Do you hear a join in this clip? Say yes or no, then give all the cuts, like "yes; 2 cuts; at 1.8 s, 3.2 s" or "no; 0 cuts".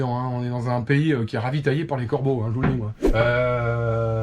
yes; 1 cut; at 3.1 s